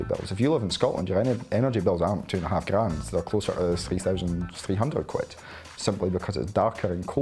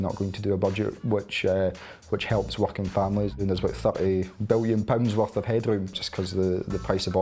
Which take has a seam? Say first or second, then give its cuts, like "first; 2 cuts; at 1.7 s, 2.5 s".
second; 2 cuts; at 3.3 s, 6.1 s